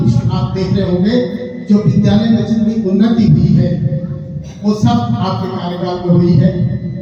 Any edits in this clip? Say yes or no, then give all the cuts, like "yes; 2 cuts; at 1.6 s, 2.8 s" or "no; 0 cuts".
no; 0 cuts